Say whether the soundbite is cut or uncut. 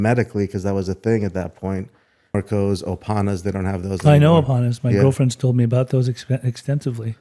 cut